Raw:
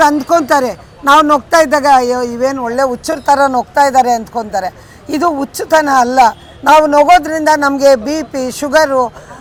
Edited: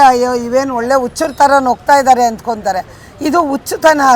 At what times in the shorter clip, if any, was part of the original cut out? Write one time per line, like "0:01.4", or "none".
none